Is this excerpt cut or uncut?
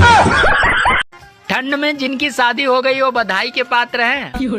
uncut